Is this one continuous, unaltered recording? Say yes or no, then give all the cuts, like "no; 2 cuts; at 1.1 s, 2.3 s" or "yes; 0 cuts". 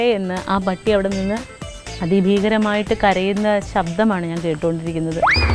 yes; 0 cuts